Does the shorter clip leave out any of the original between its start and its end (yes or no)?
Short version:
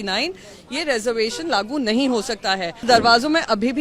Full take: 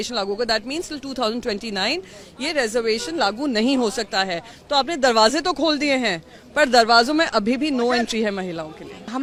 yes